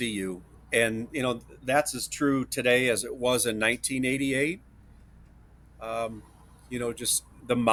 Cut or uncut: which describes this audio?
uncut